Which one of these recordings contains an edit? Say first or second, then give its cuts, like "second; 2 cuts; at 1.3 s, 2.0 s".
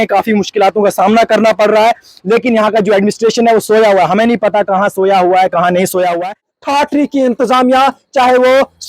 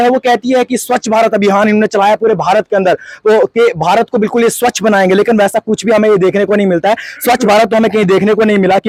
first; 1 cut; at 6.5 s